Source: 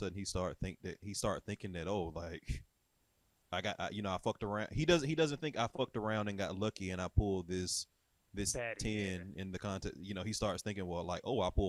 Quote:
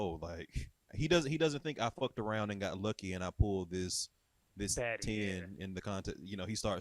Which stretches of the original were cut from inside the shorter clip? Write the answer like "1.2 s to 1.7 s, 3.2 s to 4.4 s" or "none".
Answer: 2.9 s to 4.7 s

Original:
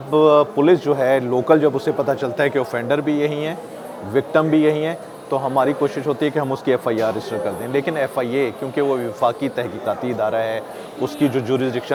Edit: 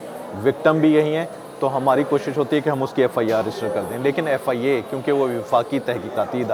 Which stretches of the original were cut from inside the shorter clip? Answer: none

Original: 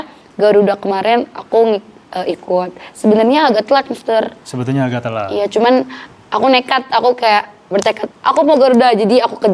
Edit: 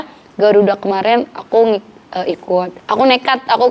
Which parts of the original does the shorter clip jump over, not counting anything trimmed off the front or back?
2.8 s to 6.2 s

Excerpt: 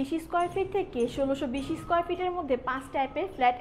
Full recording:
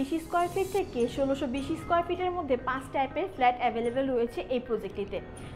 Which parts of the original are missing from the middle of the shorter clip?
none

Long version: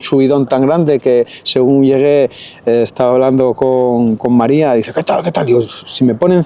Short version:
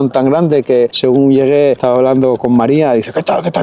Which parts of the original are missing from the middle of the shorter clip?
1.3 s to 1.5 s, 2.8 s to 4.1 s

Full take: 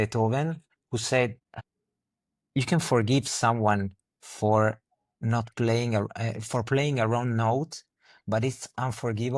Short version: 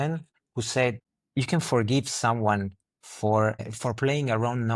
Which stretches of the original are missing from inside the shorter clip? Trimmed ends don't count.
1.5 s to 2.3 s, 4.9 s to 6.4 s

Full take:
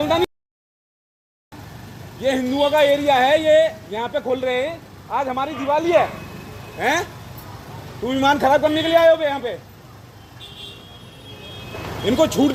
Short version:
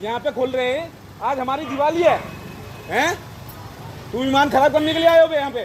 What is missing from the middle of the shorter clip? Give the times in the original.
none

